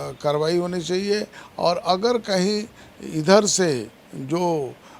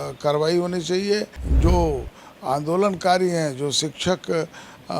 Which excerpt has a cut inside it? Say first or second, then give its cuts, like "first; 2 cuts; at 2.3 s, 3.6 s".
second; 1 cut; at 1.4 s